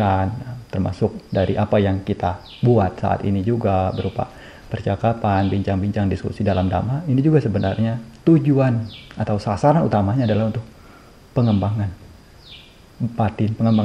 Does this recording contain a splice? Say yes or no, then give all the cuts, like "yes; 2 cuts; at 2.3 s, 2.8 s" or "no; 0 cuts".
no; 0 cuts